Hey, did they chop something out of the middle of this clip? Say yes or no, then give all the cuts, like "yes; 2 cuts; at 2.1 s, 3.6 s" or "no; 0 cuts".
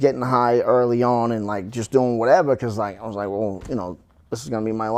no; 0 cuts